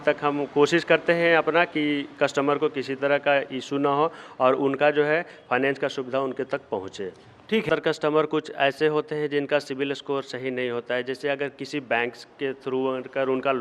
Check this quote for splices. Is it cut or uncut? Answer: cut